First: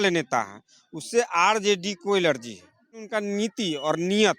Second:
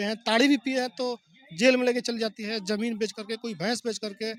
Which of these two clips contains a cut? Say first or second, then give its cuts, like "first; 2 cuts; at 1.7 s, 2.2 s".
first; 1 cut; at 3.1 s